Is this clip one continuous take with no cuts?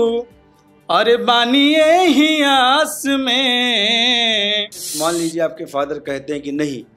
no; 1 cut; at 4.9 s

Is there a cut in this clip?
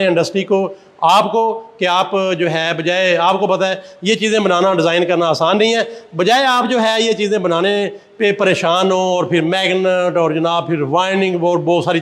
no; 0 cuts

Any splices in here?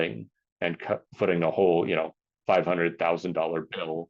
no; 0 cuts

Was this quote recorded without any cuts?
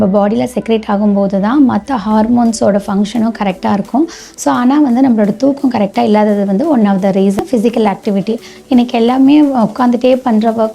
no; 1 cut; at 7.4 s

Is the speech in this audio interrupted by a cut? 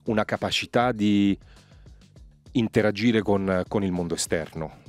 no; 0 cuts

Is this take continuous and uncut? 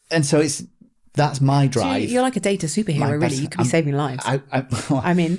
yes; 0 cuts

